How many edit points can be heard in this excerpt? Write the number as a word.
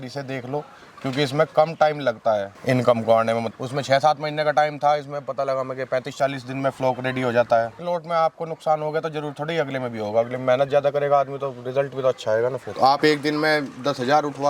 two